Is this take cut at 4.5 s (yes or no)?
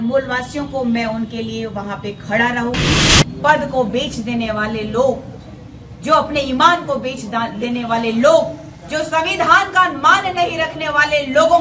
no